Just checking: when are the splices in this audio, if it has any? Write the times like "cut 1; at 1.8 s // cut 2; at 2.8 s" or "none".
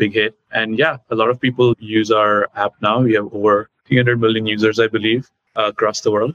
cut 1; at 3.8 s // cut 2; at 5.4 s